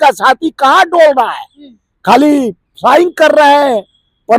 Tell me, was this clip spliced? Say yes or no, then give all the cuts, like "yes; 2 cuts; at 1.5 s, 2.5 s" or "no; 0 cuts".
no; 0 cuts